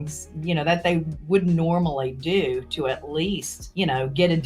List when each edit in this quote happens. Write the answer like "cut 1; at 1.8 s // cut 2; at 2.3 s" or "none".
cut 1; at 3.6 s